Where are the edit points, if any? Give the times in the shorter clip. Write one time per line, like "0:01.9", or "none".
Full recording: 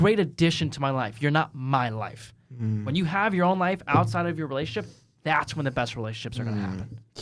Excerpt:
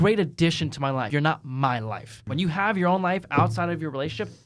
0:01.1
0:02.2